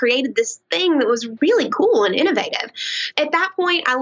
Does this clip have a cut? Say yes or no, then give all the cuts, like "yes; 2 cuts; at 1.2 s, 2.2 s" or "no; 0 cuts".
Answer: yes; 2 cuts; at 1.3 s, 3.0 s